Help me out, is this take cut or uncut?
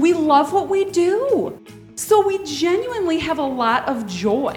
uncut